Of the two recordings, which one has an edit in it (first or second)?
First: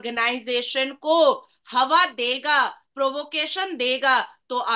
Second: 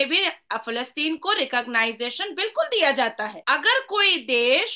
second